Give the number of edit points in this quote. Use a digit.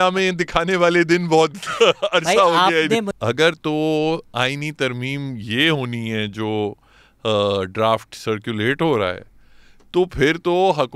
1